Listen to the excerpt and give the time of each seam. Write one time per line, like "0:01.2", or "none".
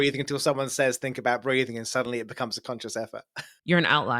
0:03.2